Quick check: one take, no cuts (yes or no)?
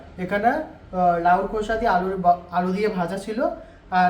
yes